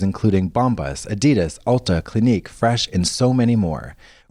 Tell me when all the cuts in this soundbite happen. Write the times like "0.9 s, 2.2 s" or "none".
none